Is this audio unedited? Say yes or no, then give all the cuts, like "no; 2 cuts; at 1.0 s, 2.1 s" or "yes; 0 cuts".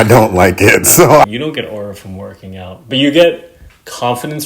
no; 1 cut; at 1.3 s